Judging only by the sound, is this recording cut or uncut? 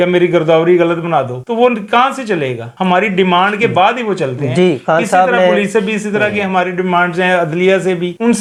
uncut